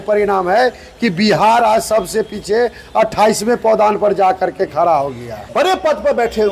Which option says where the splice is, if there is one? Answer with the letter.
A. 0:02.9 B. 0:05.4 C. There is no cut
B